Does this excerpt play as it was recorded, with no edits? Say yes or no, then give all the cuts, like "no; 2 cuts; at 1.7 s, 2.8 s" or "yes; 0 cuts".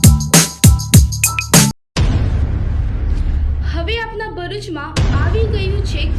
no; 1 cut; at 1.8 s